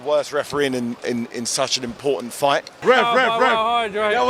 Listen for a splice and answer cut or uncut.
cut